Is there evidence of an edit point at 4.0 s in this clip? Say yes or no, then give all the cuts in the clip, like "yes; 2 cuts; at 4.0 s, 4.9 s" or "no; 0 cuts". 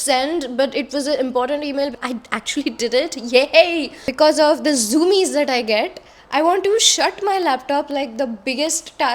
yes; 2 cuts; at 2.0 s, 4.0 s